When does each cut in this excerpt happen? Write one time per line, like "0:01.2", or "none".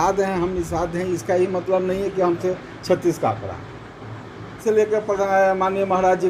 0:04.5

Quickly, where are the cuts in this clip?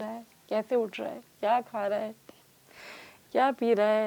none

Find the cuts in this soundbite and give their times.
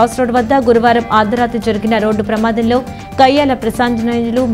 none

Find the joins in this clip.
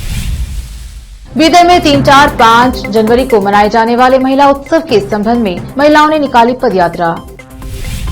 0:01.0

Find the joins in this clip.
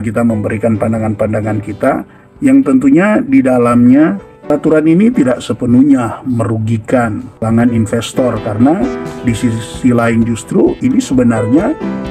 none

